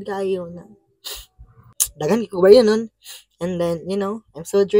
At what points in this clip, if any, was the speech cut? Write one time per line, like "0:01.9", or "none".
0:01.8